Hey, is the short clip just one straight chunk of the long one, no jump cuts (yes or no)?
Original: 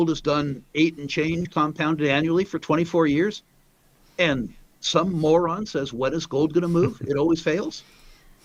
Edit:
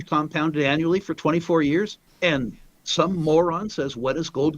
no